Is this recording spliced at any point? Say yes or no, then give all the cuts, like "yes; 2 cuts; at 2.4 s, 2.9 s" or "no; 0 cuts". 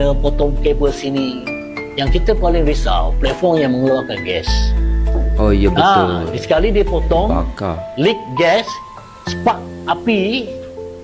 no; 0 cuts